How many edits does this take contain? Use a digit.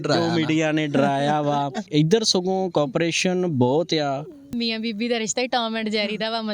2